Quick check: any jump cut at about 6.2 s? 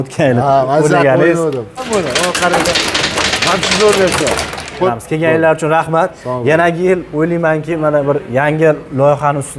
no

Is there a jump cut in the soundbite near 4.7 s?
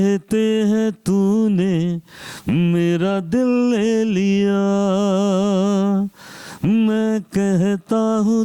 no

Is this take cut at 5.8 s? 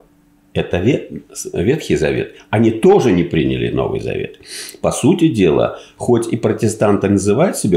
no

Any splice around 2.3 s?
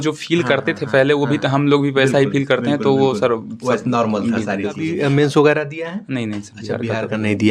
no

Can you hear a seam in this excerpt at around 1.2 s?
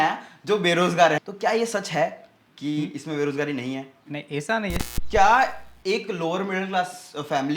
yes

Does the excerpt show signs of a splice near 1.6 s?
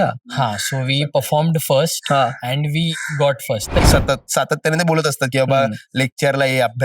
no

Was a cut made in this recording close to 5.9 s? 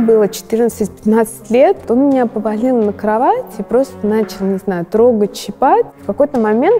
yes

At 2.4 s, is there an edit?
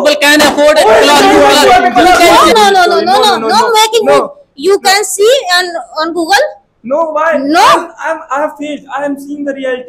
yes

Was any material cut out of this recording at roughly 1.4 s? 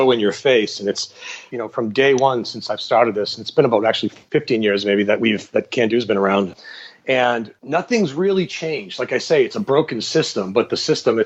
yes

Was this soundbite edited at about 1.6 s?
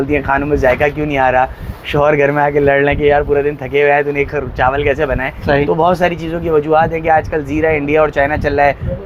no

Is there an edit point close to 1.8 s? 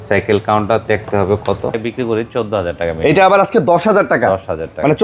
yes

